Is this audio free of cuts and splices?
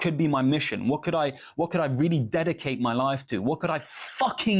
yes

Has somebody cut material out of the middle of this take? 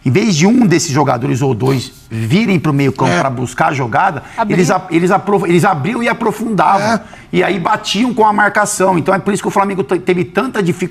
no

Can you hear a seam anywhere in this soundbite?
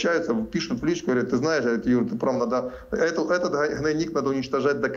no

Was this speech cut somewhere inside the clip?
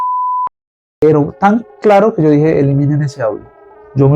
yes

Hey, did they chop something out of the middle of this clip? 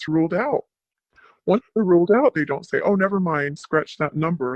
no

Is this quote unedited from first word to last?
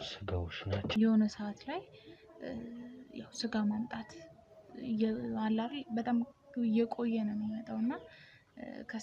no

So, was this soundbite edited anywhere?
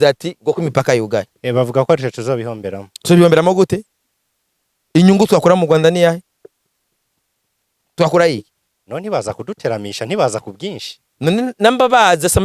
no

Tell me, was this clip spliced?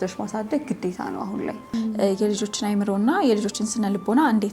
yes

